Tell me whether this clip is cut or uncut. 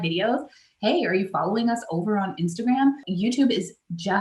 cut